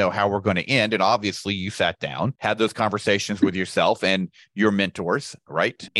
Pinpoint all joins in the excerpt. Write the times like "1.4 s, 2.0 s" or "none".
none